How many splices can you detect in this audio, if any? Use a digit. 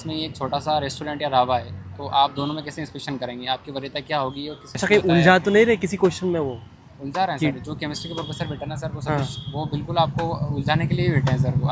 1